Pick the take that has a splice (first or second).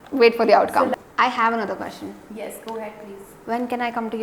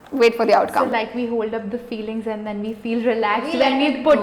first